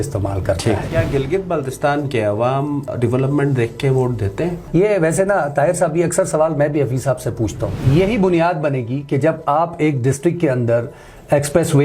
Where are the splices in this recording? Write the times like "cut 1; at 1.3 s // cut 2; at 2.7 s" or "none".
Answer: cut 1; at 0.9 s // cut 2; at 2.9 s // cut 3; at 4.6 s // cut 4; at 7.7 s